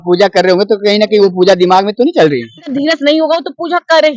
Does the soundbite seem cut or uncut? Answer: cut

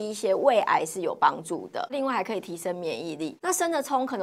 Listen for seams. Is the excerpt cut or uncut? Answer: cut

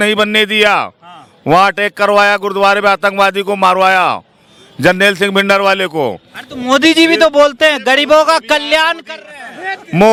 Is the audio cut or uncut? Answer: uncut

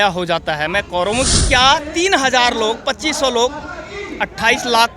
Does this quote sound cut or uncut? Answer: cut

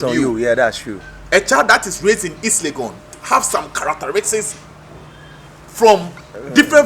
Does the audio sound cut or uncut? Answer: cut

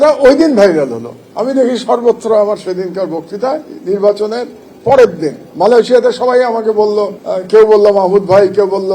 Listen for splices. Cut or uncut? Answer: uncut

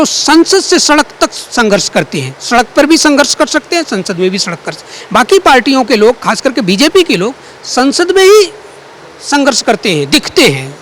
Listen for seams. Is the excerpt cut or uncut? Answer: uncut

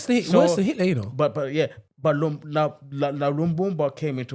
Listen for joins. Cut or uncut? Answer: cut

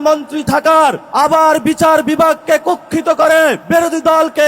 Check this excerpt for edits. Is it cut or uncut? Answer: cut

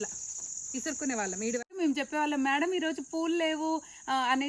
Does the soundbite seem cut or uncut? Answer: cut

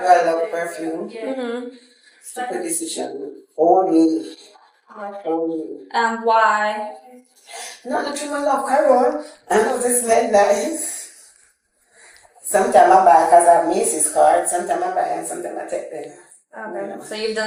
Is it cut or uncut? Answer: uncut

